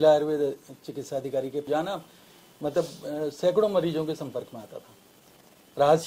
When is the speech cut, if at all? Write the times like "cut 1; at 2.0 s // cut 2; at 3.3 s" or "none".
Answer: cut 1; at 1.7 s